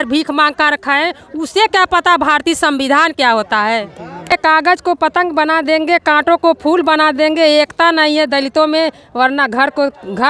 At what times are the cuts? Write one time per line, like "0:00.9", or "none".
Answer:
0:04.3